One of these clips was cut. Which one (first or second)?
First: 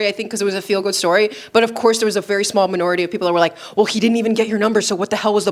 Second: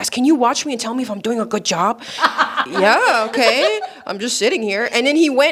second